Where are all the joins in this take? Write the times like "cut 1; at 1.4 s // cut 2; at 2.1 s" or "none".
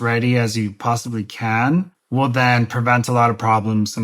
cut 1; at 2.0 s